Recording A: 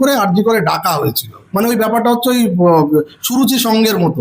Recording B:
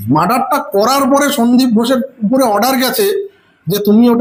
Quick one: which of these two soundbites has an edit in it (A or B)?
A